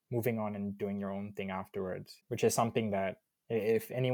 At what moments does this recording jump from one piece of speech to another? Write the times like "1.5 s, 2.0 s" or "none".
2.2 s